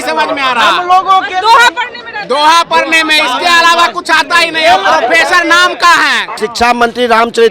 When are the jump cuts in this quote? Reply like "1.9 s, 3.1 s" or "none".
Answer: 6.3 s